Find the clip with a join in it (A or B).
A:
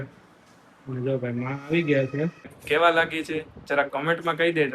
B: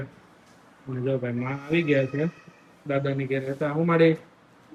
A